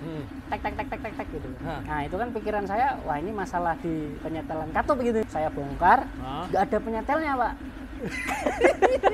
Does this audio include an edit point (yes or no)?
yes